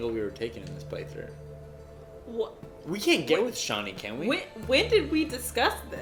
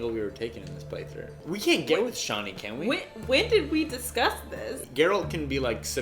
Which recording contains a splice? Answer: second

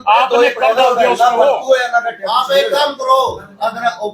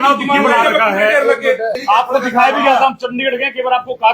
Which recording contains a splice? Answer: second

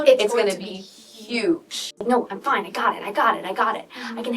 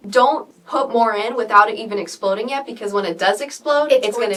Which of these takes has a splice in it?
first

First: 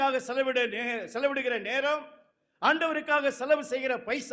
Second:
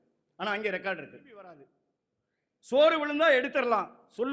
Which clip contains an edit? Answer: second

